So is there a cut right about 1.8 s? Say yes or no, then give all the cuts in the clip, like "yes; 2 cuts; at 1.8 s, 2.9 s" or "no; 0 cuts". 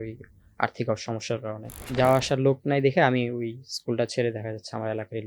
yes; 1 cut; at 1.8 s